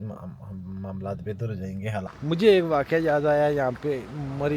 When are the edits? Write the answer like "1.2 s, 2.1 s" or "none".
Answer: 2.1 s